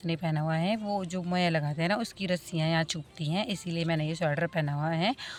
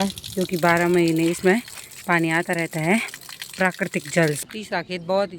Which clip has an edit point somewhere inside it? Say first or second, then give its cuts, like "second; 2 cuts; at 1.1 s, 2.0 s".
second; 1 cut; at 4.4 s